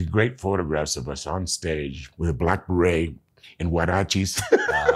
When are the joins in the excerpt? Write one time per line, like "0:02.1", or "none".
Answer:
0:02.0